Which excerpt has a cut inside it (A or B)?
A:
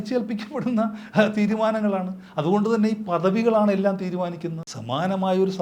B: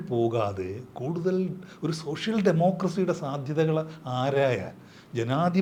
A